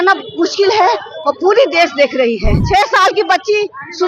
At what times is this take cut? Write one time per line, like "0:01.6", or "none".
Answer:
0:02.5